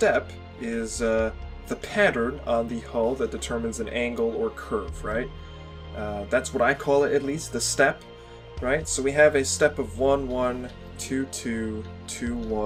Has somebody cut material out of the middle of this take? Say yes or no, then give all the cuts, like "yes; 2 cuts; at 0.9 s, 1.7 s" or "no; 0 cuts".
no; 0 cuts